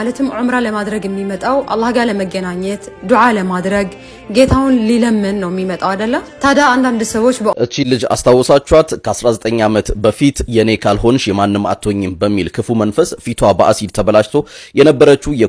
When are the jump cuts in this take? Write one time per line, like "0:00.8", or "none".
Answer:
0:07.6